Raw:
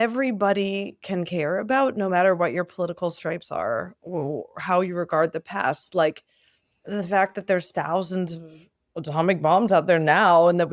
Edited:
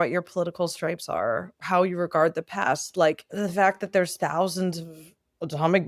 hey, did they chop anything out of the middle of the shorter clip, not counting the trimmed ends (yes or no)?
yes